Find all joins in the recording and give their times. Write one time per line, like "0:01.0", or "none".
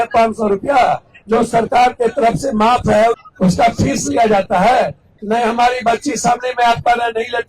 0:01.1
0:03.2
0:05.1